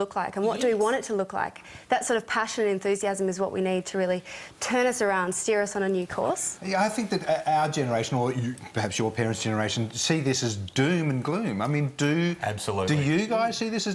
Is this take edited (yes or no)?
no